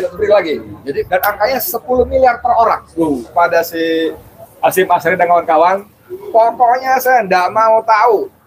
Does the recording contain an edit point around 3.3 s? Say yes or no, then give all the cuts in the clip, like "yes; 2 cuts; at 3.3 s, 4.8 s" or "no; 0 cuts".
yes; 2 cuts; at 1.1 s, 3.3 s